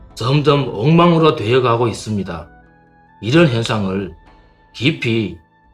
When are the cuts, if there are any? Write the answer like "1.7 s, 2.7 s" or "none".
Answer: 1.7 s

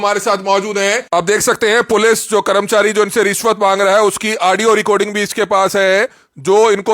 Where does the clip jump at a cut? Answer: 1.0 s

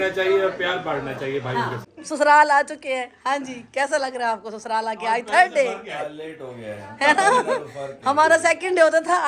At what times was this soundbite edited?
1.8 s

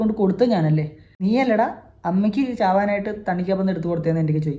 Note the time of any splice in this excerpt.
1.1 s

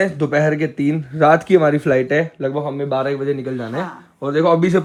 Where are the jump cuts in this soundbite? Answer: none

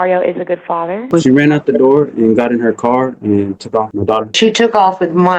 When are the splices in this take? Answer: 1.1 s, 4.3 s

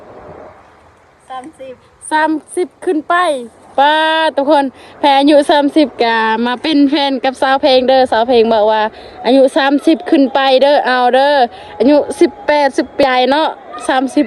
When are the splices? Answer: 13.0 s

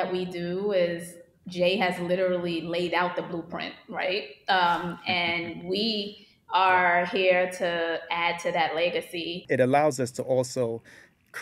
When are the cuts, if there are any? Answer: 9.4 s

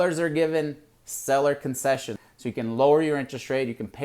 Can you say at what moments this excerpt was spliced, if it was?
2.1 s

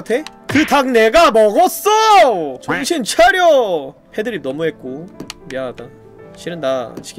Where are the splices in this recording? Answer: 6.2 s

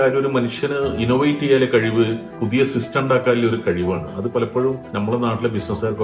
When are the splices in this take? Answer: 2.3 s

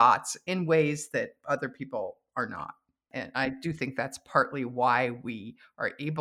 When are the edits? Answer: 3.1 s

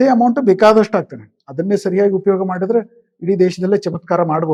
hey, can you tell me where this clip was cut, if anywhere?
none

